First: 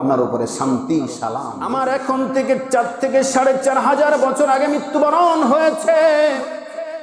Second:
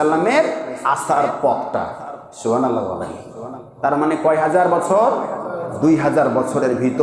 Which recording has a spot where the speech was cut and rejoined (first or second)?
first